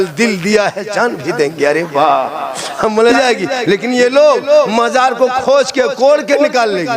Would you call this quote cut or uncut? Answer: cut